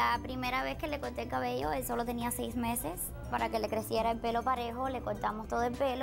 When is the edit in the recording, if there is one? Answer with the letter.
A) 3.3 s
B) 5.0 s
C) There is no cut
A